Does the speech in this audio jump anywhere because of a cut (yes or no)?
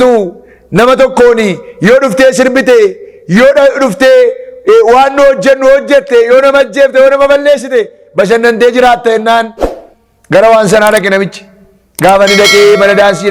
no